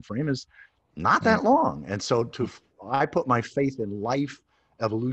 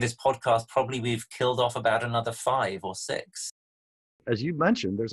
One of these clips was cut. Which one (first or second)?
second